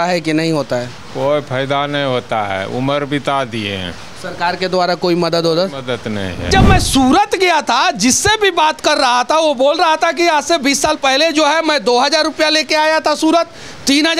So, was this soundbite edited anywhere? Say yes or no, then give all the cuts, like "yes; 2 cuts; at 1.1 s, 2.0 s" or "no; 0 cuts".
yes; 1 cut; at 6.5 s